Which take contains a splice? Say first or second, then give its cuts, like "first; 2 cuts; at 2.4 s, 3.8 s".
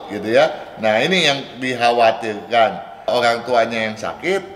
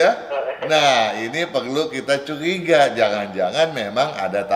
first; 1 cut; at 2.9 s